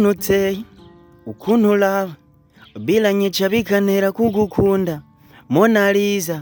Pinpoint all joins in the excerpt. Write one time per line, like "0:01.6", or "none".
none